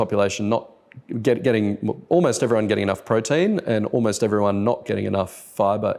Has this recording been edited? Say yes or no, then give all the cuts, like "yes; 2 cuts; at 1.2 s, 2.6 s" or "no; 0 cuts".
no; 0 cuts